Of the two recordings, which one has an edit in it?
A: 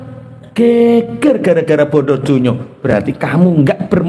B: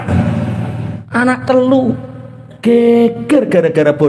B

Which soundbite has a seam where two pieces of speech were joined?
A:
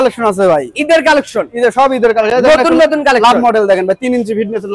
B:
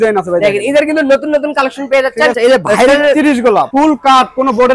B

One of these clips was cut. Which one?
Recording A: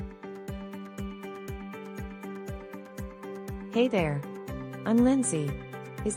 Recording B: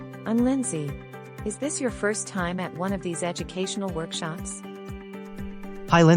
B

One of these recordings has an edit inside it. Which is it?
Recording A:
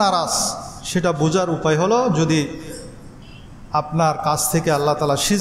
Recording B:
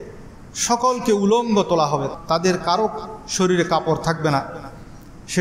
B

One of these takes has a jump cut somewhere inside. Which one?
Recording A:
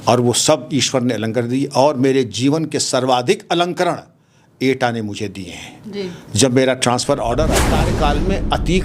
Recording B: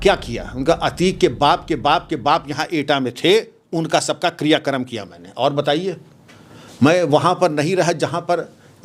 A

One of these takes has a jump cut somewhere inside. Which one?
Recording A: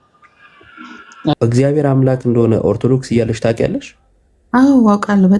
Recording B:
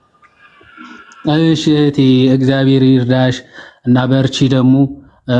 A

